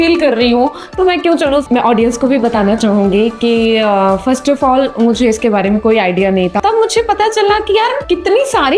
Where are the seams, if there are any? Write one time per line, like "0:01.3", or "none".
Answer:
0:01.6
0:06.6